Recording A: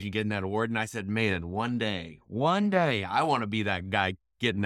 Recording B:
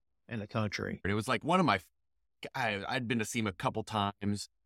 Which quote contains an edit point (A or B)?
B